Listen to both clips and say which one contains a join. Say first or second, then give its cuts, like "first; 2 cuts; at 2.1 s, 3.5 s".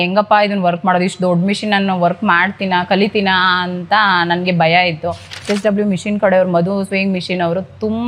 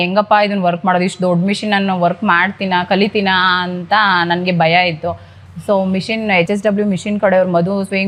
first; 1 cut; at 5.5 s